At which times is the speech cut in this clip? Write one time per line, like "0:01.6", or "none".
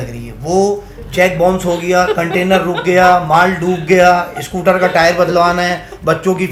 none